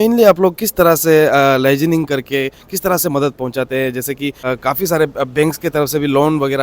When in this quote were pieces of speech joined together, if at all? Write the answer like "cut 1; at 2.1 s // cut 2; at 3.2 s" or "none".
cut 1; at 4.5 s